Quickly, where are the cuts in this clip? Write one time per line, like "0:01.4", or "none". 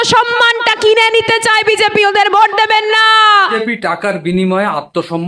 none